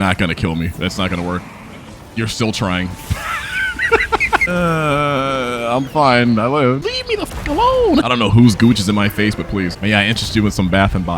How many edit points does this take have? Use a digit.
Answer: 2